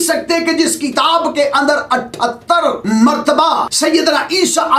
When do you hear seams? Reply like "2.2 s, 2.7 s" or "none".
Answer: 2.8 s, 3.7 s